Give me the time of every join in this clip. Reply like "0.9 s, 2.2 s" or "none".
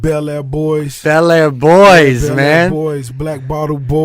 none